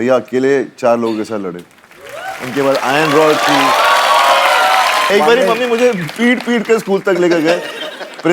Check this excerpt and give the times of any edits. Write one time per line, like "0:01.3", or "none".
0:05.1